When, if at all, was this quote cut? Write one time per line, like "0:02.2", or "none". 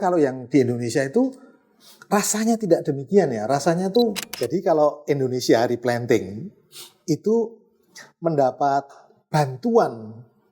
0:04.2